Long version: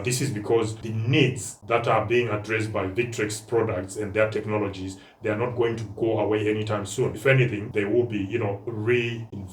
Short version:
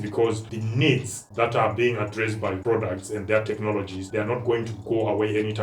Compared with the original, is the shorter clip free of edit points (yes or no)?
no